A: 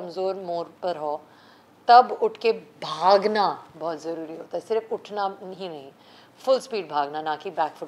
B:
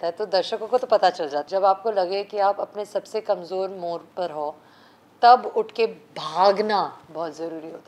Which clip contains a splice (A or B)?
B